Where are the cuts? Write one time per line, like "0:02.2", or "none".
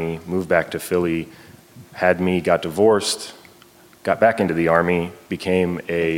none